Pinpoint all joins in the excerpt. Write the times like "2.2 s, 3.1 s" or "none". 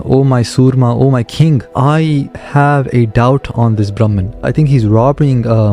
1.7 s, 4.4 s